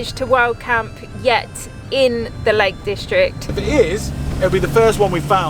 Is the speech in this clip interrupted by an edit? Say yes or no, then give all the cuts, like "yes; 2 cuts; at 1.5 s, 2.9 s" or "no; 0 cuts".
yes; 1 cut; at 3.5 s